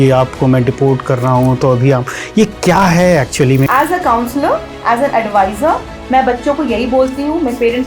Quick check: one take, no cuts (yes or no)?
no